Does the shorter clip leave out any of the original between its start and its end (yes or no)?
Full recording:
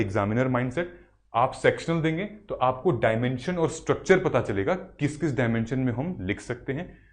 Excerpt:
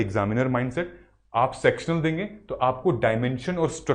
no